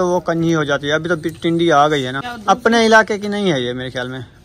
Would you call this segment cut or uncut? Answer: cut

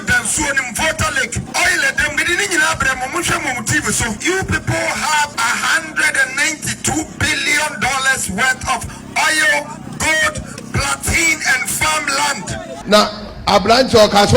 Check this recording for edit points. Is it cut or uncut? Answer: cut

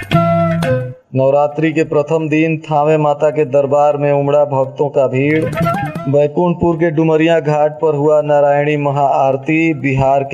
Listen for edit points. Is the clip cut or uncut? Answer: cut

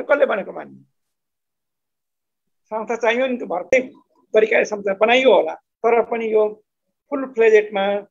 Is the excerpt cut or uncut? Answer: cut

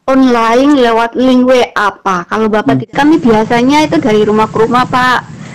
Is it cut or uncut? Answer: cut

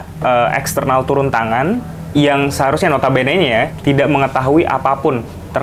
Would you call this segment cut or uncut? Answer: uncut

